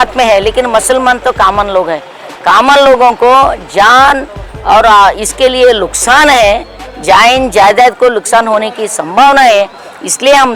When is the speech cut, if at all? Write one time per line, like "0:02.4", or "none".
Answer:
none